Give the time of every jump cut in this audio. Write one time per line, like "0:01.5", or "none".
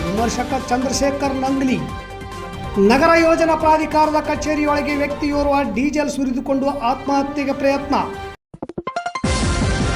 0:08.2

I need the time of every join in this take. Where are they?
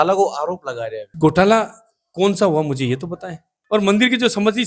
0:01.0
0:03.5

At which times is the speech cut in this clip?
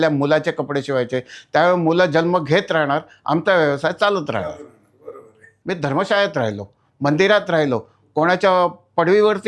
0:05.5

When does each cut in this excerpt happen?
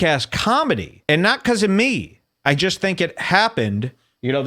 0:00.9

